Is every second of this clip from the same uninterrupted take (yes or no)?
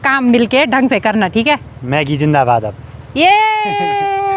yes